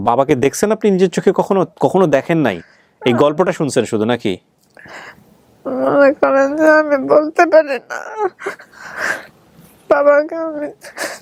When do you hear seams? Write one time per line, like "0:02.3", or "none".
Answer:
none